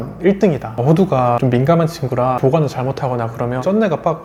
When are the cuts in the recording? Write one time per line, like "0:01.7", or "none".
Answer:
none